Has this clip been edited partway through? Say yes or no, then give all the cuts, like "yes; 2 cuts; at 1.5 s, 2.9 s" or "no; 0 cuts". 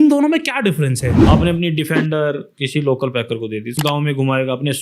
yes; 3 cuts; at 1.1 s, 2.5 s, 3.7 s